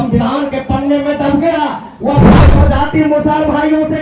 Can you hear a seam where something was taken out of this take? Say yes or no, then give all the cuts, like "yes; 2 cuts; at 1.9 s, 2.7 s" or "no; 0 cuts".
yes; 1 cut; at 2.4 s